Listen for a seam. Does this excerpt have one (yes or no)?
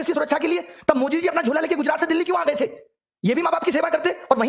no